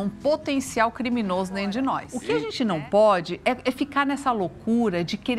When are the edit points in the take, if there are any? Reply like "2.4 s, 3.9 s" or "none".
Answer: 2.1 s